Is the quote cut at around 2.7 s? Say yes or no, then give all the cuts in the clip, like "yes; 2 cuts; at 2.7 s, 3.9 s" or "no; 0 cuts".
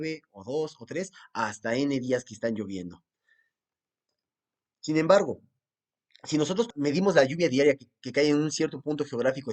no; 1 cut; at 6.7 s